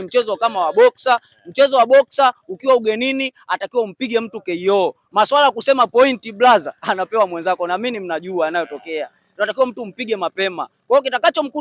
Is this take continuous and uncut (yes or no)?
yes